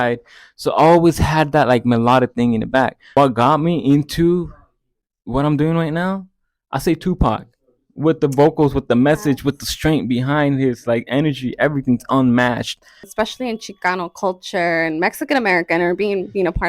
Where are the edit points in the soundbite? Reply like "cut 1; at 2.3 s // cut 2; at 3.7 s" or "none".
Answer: cut 1; at 3.0 s // cut 2; at 13.0 s